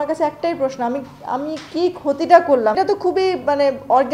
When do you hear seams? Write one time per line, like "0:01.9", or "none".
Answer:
0:02.8